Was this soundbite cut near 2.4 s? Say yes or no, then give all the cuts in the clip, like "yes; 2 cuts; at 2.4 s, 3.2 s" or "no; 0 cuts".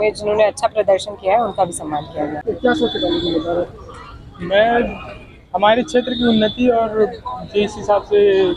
yes; 1 cut; at 2.4 s